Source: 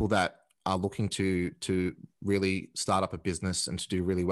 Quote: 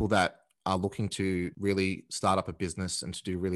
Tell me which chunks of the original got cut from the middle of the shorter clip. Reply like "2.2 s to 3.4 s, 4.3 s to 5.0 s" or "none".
1.5 s to 2.2 s